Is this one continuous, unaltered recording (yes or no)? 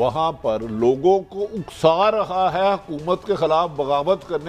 yes